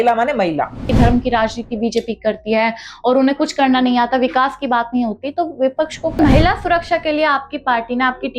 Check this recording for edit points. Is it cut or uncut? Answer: cut